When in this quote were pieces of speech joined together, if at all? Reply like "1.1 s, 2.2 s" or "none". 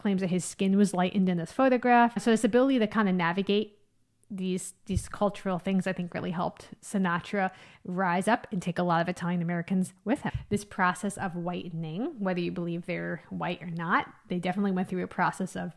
2.2 s, 10.3 s